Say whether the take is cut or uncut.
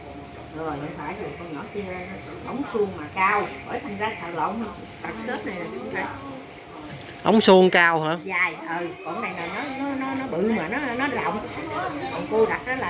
uncut